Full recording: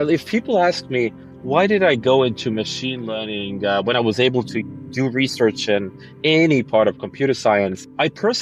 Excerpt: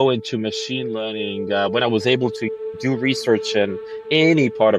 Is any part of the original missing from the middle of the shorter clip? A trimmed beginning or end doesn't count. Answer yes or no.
no